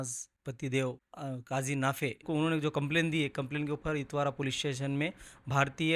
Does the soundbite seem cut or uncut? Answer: cut